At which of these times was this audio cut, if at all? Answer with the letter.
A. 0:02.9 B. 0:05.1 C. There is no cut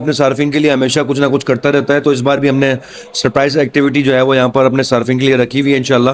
C